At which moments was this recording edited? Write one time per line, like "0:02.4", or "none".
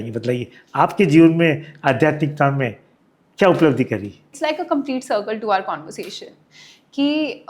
0:04.2